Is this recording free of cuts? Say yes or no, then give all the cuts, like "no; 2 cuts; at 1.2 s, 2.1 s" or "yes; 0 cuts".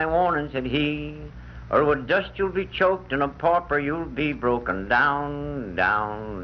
no; 1 cut; at 5.0 s